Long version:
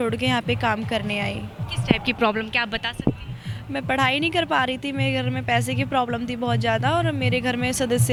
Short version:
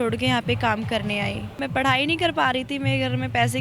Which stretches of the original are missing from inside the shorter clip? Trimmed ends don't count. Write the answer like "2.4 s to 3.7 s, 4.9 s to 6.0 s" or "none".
1.5 s to 3.6 s